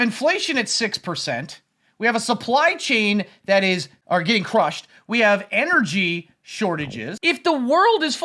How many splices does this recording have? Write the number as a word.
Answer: two